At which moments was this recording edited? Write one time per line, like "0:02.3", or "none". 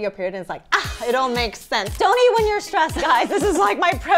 0:01.9